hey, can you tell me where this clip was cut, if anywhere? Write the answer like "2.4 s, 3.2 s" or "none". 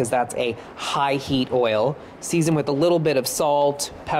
none